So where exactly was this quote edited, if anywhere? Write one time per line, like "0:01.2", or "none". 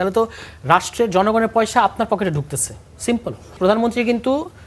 0:03.6